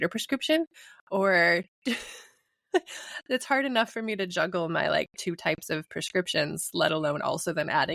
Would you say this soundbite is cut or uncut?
uncut